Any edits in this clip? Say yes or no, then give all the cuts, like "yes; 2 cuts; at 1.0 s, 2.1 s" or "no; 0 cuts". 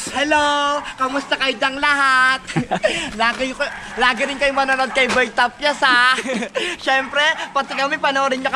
no; 0 cuts